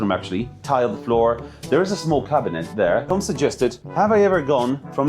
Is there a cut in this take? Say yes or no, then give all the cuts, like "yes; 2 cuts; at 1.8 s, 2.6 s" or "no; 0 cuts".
yes; 1 cut; at 3.1 s